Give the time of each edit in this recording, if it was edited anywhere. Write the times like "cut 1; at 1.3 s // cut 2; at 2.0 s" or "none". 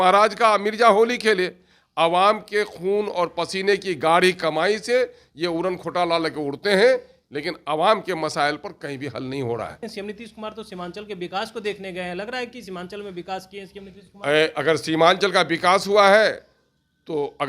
cut 1; at 9.8 s